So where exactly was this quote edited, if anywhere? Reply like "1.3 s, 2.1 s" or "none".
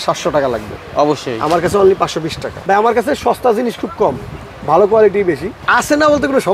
2.5 s, 5.6 s